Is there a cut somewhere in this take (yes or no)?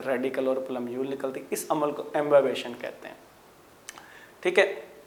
no